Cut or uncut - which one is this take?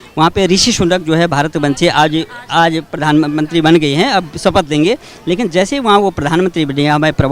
uncut